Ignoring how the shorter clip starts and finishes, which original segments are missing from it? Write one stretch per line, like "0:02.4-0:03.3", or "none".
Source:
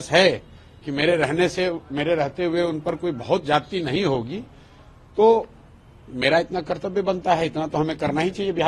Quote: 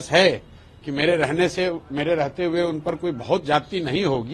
none